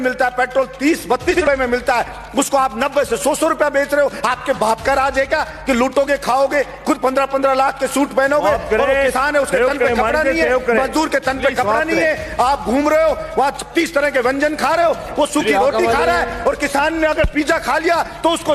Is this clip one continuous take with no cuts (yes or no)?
no